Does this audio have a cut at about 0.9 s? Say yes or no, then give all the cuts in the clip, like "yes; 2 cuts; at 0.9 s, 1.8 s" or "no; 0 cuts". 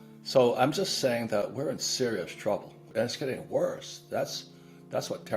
no; 1 cut; at 2.9 s